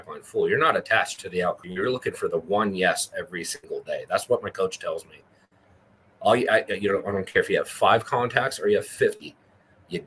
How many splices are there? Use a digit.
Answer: 1